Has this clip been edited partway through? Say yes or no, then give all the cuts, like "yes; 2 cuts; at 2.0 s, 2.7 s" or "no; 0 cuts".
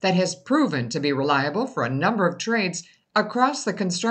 no; 0 cuts